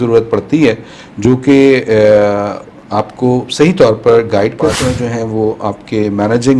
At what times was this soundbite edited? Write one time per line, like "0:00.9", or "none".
0:04.8

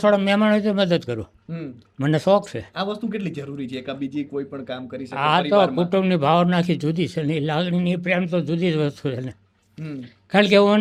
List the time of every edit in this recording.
none

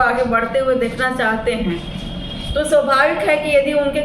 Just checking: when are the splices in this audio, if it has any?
none

